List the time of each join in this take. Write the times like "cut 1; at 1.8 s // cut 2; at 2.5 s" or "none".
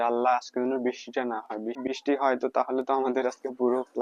cut 1; at 1.8 s